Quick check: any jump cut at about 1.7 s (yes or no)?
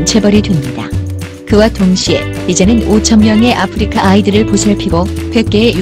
yes